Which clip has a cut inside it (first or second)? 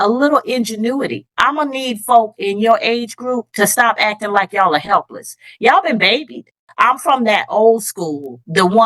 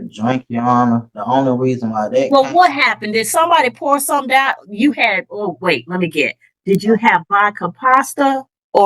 first